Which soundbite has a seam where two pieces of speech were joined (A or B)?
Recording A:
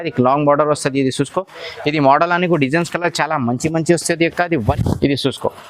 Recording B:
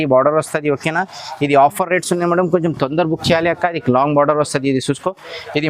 A